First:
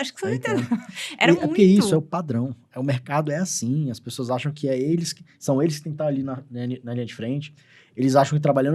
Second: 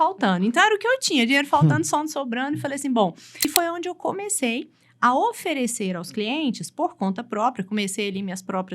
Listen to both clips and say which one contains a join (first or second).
second